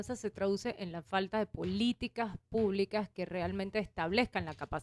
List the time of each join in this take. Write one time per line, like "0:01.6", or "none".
none